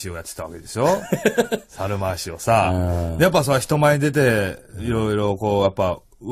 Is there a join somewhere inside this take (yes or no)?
no